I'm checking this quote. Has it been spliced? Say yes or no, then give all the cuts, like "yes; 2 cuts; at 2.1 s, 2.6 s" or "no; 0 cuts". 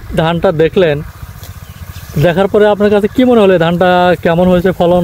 no; 0 cuts